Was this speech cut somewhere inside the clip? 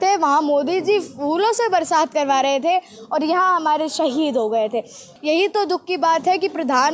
yes; 1 cut; at 5.1 s

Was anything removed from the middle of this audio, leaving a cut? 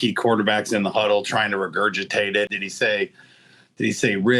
yes; 1 cut; at 2.6 s

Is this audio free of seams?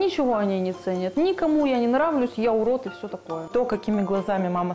no; 1 cut; at 3.5 s

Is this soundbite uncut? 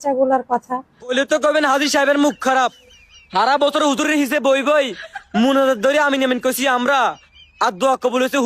no; 1 cut; at 1.1 s

